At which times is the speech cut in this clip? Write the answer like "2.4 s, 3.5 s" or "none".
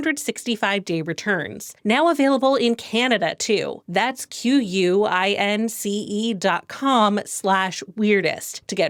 none